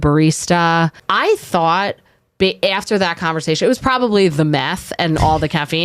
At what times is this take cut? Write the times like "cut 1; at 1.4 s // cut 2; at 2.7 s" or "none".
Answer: cut 1; at 1.0 s